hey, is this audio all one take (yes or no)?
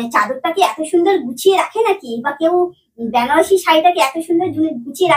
yes